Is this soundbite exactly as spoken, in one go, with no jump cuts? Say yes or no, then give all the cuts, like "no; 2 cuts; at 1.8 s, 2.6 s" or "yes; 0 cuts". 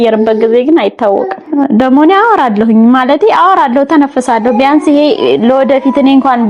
no; 1 cut; at 1.4 s